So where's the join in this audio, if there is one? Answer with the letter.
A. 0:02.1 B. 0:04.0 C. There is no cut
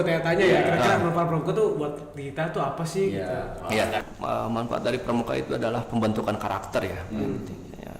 B